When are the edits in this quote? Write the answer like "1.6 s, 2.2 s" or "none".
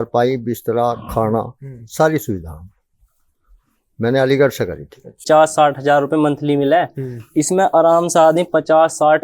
5.2 s